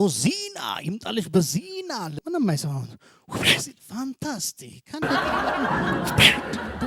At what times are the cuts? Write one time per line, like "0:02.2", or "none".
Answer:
none